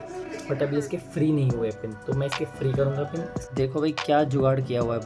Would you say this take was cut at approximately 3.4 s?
yes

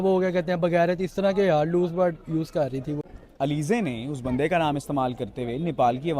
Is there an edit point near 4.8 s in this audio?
no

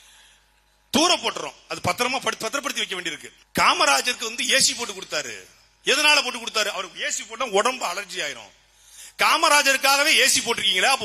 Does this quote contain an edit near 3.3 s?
yes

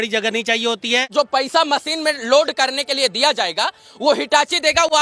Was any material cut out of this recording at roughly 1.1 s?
yes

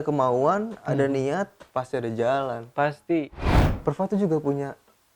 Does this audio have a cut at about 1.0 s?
no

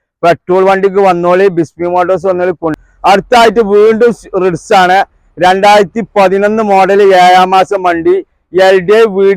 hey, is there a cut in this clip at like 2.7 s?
yes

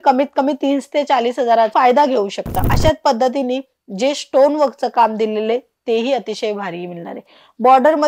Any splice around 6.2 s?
no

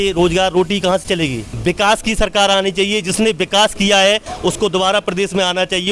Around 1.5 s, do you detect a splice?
yes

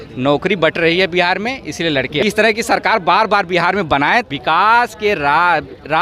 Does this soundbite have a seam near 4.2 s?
yes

